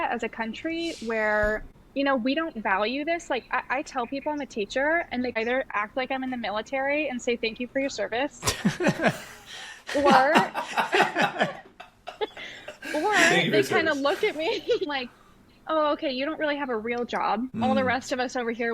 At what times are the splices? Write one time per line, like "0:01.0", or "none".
0:01.8
0:05.6
0:14.9
0:17.7